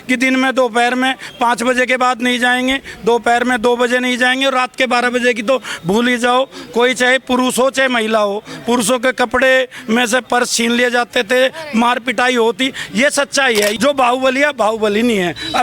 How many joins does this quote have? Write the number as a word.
one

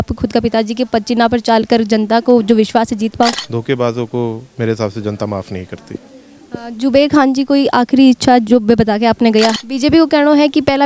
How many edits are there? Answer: two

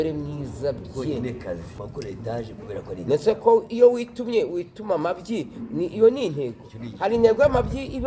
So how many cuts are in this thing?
one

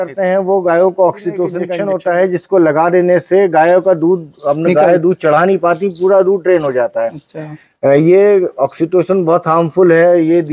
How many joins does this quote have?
one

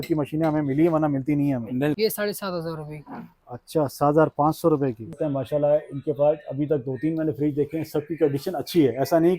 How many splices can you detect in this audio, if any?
two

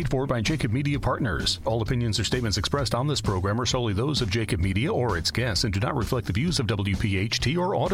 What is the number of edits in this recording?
one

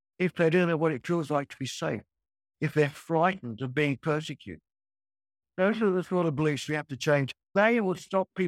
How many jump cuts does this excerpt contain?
two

